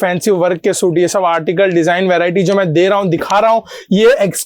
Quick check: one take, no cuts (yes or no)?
yes